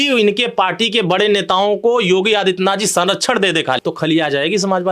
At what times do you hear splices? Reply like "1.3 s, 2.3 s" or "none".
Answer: 3.8 s